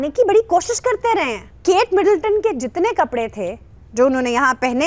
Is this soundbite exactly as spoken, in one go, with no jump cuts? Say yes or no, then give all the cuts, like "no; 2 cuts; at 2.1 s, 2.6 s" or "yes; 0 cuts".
no; 1 cut; at 1.5 s